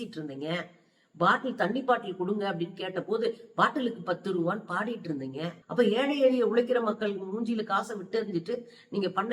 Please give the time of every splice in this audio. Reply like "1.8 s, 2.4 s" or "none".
5.5 s